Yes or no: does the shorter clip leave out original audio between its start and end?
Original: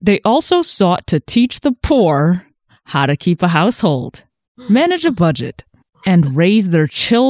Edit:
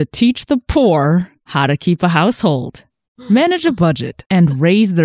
yes